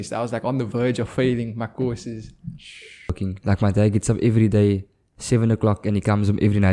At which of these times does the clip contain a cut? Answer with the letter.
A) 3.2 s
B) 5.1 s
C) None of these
A